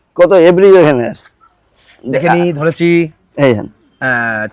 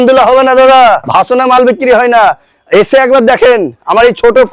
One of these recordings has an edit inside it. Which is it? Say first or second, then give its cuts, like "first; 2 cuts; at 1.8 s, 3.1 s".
second; 1 cut; at 1.0 s